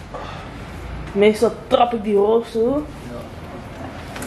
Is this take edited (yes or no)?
no